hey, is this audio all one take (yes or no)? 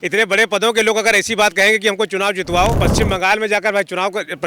no